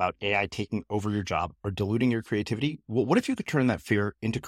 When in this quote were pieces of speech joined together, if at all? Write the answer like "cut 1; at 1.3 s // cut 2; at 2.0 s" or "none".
none